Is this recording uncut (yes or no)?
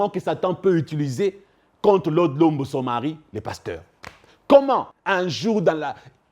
no